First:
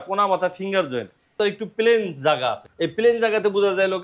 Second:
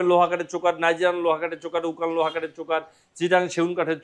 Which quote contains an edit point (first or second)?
first